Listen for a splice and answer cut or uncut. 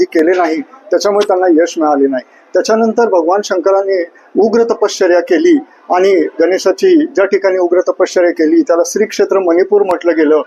uncut